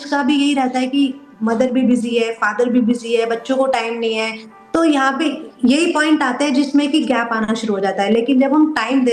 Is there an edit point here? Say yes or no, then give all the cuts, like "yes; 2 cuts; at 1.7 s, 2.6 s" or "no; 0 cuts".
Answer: no; 0 cuts